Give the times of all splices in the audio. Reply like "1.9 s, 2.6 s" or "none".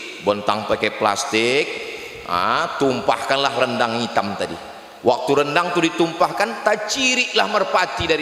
none